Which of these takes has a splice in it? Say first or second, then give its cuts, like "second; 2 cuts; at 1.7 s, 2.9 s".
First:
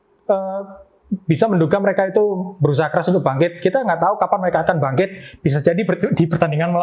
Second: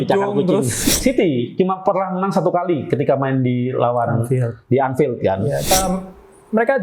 second; 2 cuts; at 0.9 s, 5.7 s